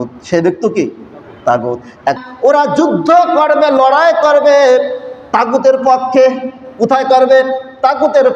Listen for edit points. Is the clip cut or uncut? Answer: cut